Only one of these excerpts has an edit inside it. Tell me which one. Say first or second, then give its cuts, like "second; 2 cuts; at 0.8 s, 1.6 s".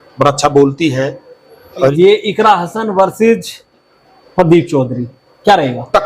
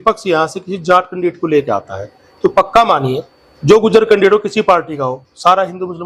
first; 1 cut; at 1.9 s